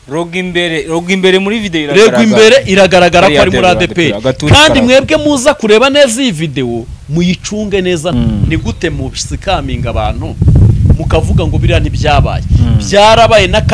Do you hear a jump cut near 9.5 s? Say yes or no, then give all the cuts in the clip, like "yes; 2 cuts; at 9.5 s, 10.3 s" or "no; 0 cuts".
no; 1 cut; at 8.1 s